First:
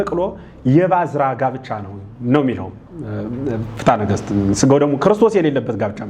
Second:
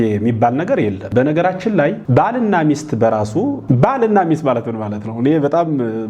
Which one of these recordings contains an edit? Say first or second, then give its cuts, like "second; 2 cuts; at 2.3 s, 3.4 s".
second; 3 cuts; at 1.1 s, 2.0 s, 3.6 s